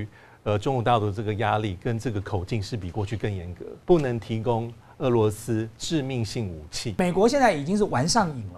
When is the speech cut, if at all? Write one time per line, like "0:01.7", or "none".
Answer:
0:03.7
0:06.9